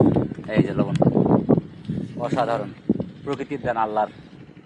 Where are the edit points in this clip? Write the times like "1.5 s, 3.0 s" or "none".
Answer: none